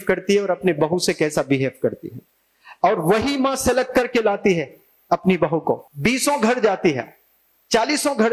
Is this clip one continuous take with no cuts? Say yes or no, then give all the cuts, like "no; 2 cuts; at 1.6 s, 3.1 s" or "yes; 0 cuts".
no; 1 cut; at 5.8 s